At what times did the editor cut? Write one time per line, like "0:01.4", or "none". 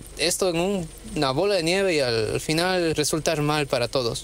0:02.9